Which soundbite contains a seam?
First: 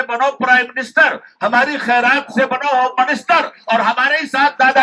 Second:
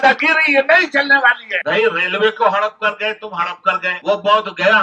second; 2 cuts; at 1.5 s, 3.9 s

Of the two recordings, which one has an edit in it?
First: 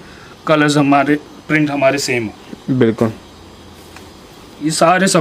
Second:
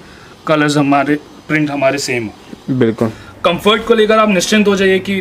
second; 1 cut; at 3.2 s

